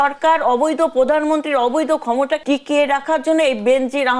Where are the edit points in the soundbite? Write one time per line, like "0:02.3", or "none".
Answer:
0:02.4